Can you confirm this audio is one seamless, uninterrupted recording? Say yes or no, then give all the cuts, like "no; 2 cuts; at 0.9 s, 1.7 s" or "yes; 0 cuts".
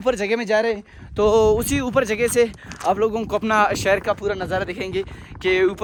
yes; 0 cuts